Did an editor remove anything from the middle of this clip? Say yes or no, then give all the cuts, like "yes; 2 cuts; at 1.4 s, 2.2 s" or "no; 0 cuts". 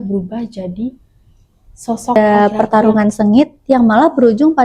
yes; 1 cut; at 2.2 s